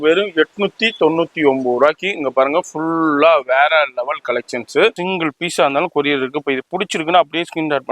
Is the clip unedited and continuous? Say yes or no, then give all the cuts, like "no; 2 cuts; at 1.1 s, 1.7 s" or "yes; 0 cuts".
no; 1 cut; at 5.0 s